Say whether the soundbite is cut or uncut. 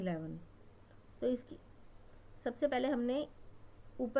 uncut